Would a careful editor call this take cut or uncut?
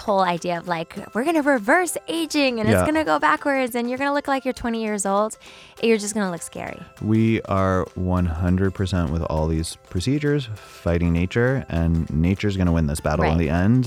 uncut